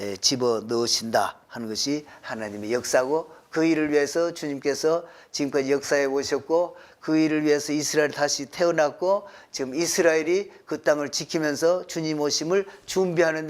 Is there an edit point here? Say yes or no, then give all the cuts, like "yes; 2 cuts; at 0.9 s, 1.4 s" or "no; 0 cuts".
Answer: no; 0 cuts